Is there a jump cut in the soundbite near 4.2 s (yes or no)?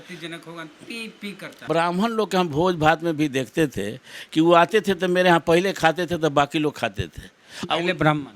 no